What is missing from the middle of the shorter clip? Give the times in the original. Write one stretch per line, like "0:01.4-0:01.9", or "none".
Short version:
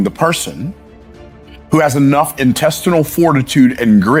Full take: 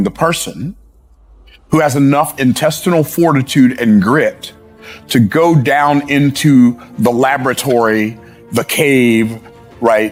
none